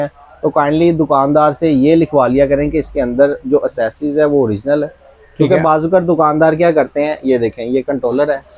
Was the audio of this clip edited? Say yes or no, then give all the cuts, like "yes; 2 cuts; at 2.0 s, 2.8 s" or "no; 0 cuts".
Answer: no; 0 cuts